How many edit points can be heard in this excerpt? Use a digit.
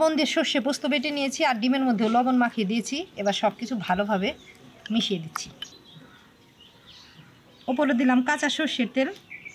2